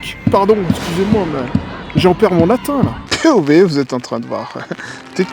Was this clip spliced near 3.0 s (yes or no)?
yes